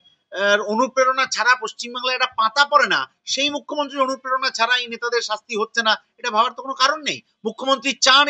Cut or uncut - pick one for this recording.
uncut